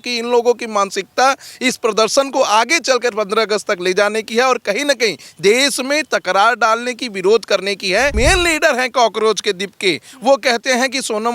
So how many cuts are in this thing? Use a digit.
1